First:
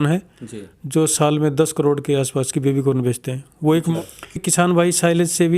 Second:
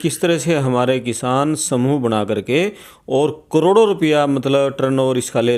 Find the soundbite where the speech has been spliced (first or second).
first